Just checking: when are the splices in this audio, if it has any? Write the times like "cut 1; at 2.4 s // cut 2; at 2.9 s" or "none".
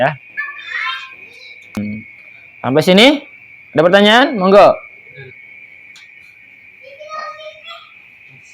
cut 1; at 1.8 s